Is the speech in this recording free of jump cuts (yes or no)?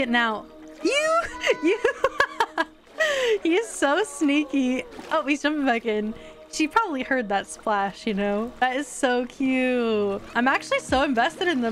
yes